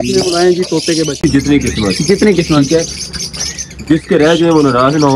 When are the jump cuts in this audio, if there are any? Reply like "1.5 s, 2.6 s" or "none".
1.2 s